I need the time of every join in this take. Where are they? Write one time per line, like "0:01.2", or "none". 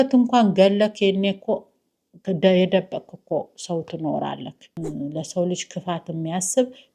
0:04.7